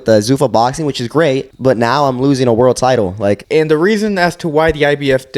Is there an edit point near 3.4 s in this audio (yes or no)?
yes